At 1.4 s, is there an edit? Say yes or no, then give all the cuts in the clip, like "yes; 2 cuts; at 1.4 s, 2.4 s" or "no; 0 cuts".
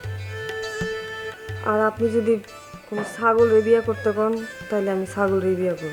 yes; 1 cut; at 1.4 s